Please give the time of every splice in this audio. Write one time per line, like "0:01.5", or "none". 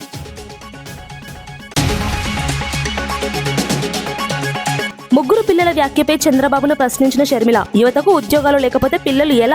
0:01.5
0:04.9